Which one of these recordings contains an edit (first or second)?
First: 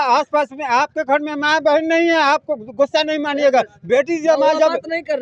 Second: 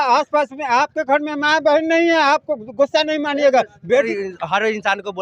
second